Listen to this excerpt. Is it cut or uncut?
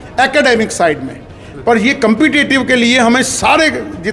uncut